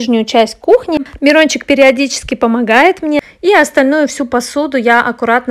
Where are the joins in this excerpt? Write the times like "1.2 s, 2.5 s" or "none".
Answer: 1.0 s, 3.2 s